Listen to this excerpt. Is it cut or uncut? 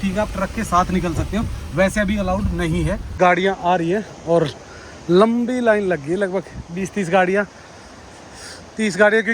cut